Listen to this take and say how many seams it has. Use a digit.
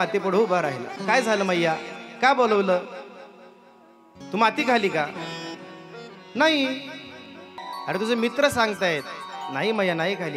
1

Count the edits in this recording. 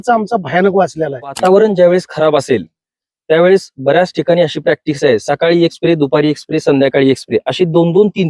1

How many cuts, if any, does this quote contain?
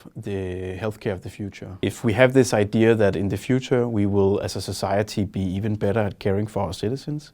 1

